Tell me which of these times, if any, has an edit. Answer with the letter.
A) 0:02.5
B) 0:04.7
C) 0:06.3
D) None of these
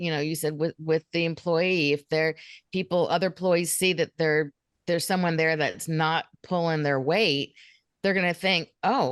B